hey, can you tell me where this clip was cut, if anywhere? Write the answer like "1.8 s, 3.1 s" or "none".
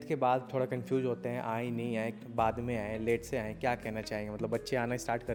none